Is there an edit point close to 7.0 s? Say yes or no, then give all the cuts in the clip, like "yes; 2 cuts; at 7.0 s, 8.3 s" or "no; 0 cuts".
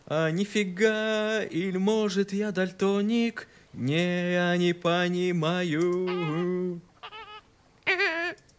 yes; 1 cut; at 7.0 s